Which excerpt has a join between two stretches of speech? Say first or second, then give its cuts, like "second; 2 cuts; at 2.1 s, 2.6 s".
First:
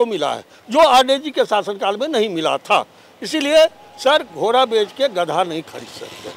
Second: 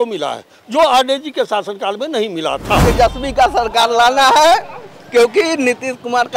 second; 1 cut; at 2.8 s